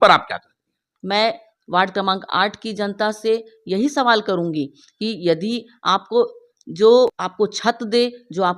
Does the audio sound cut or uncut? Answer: cut